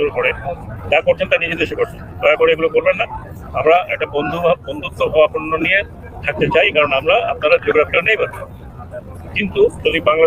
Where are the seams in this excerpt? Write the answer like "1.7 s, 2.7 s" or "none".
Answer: none